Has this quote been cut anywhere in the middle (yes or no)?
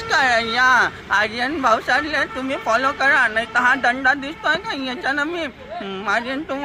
no